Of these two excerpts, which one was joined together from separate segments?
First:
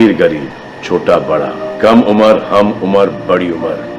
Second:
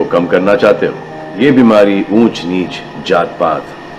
second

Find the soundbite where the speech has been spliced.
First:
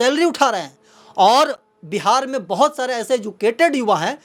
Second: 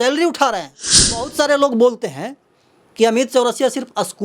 second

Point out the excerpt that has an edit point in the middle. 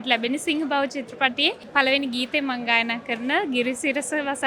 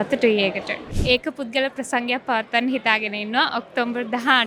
second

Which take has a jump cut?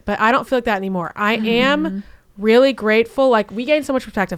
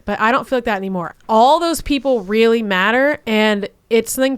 second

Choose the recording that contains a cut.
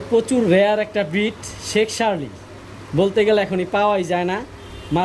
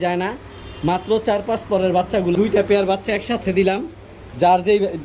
second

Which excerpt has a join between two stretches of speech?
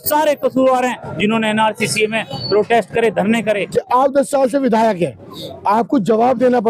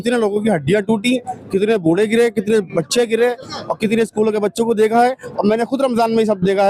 first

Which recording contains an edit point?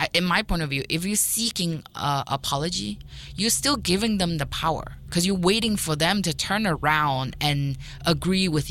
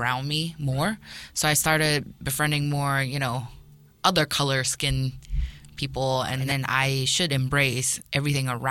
second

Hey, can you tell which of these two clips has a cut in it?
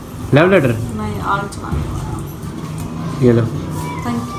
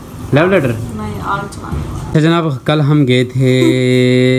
second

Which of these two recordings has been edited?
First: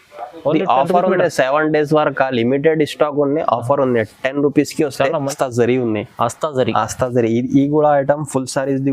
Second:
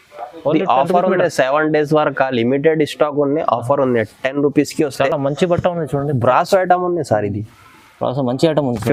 first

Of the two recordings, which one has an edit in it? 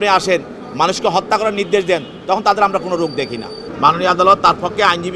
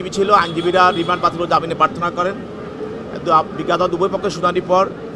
first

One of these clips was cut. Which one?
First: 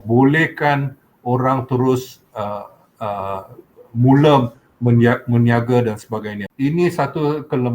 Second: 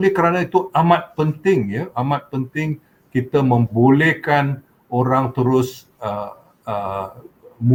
first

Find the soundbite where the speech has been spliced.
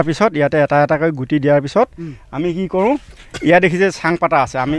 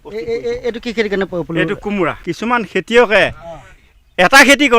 second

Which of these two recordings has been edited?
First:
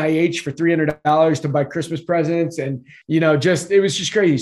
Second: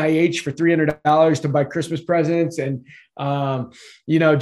first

